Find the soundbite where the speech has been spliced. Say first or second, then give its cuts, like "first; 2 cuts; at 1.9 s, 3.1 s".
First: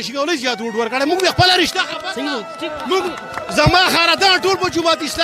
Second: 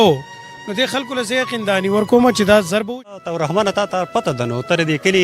second; 1 cut; at 2.9 s